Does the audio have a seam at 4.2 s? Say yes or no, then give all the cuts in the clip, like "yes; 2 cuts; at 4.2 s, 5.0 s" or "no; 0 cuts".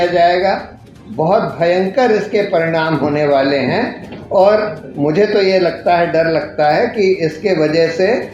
no; 0 cuts